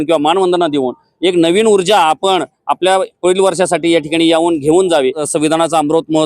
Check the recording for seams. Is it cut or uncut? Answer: cut